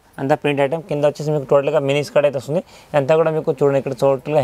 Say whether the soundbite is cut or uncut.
uncut